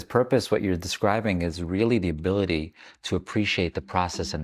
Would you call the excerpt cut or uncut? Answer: uncut